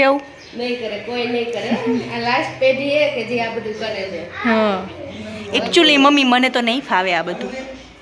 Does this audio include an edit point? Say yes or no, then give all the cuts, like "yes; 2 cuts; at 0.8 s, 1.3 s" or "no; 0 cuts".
no; 0 cuts